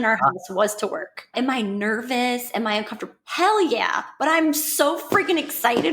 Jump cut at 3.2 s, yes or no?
no